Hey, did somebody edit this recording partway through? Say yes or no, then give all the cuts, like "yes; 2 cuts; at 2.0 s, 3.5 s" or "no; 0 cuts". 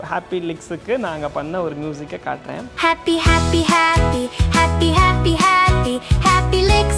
yes; 1 cut; at 2.7 s